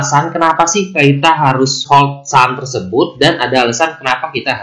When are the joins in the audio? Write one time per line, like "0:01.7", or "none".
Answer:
0:01.8